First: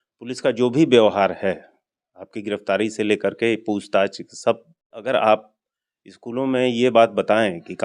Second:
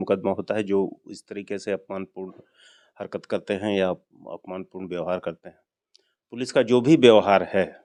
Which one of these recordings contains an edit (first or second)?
first